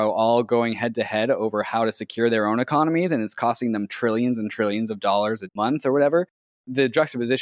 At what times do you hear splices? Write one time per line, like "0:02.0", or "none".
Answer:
0:05.5
0:06.6